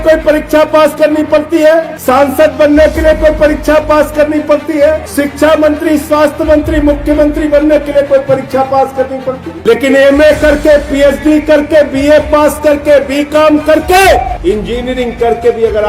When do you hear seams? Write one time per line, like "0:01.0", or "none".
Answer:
0:01.9
0:05.1
0:09.5
0:14.3